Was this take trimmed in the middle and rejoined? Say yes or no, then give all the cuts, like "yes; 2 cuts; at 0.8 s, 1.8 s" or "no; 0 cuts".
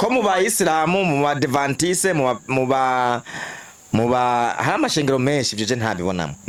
no; 0 cuts